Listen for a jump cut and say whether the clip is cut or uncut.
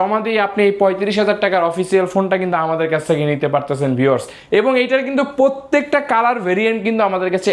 uncut